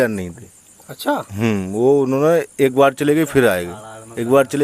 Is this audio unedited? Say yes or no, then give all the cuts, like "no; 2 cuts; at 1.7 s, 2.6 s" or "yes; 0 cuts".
yes; 0 cuts